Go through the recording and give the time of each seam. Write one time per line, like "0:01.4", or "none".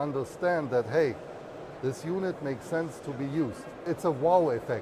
0:03.9

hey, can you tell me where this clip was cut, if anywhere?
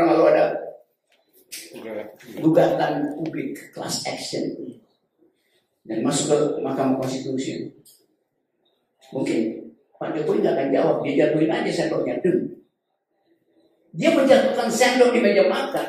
none

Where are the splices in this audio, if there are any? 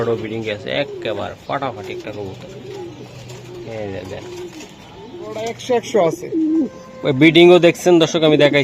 0:05.4

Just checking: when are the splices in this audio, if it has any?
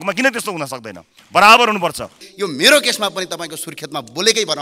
0:02.2

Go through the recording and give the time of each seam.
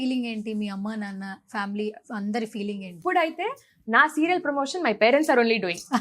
0:03.0

